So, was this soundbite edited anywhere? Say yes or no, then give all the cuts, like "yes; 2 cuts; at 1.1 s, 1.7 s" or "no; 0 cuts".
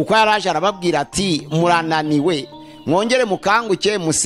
no; 0 cuts